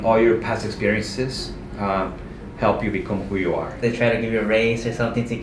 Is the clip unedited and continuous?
no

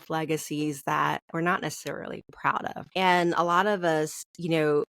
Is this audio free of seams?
no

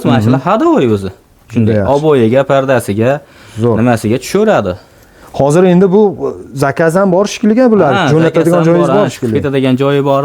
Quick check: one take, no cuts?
no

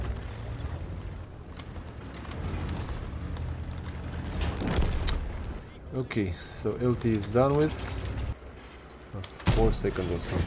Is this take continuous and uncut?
no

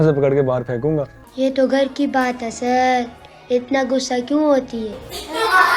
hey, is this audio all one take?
no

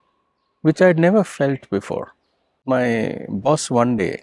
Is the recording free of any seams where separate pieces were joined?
no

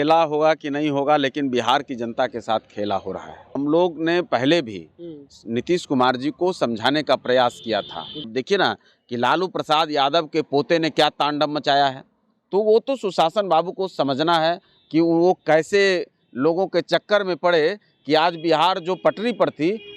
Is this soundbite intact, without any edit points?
no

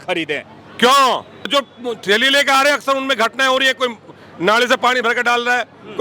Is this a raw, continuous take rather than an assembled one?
no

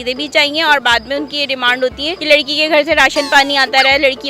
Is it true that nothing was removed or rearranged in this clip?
no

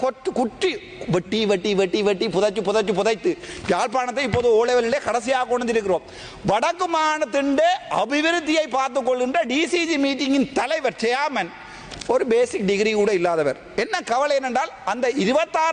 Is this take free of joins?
yes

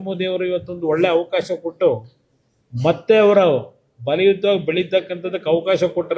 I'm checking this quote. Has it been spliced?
no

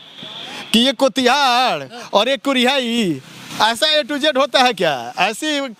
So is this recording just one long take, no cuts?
yes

